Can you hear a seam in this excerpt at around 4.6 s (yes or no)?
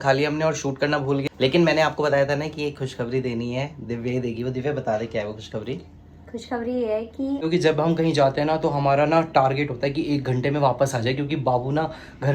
no